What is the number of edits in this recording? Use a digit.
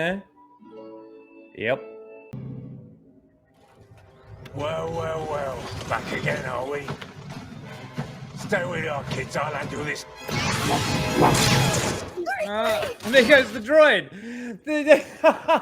1